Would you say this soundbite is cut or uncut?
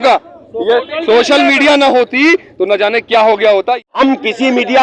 cut